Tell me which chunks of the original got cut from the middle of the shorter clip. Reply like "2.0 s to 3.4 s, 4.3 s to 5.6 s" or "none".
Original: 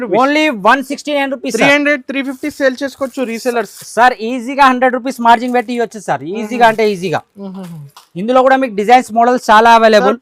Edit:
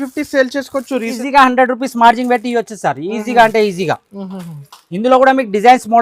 3.4 s to 4.4 s